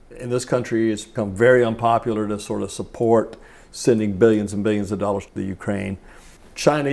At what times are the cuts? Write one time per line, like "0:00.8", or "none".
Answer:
0:01.1